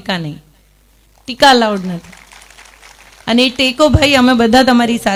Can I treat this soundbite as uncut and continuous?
yes; 0 cuts

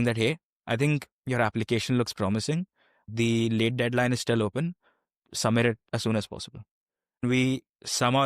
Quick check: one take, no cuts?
no; 2 cuts; at 3.1 s, 7.2 s

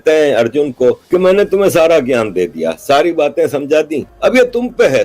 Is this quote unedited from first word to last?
no; 2 cuts; at 1.0 s, 4.0 s

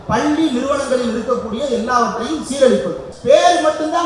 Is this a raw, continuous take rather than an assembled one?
no; 1 cut; at 3.1 s

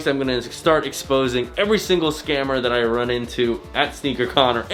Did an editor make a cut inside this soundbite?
no; 0 cuts

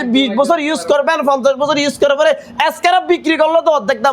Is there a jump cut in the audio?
no; 0 cuts

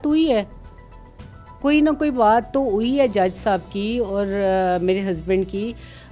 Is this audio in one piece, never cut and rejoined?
yes; 0 cuts

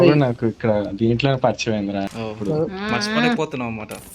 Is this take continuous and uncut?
no; 1 cut; at 2.1 s

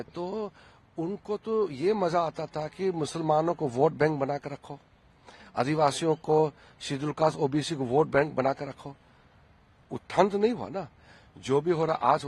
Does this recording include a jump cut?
no; 0 cuts

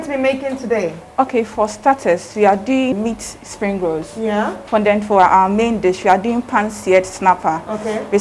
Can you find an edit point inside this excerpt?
yes; 1 cut; at 2.9 s

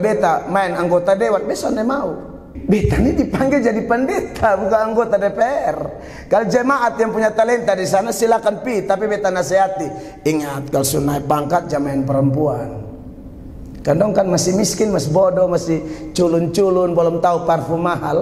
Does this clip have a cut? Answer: yes; 1 cut; at 2.5 s

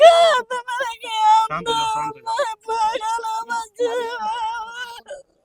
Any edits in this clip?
no; 0 cuts

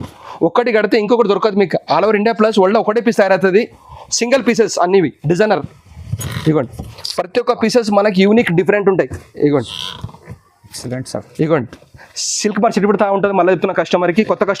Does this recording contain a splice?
no; 0 cuts

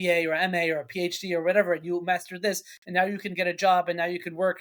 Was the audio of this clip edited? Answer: no; 0 cuts

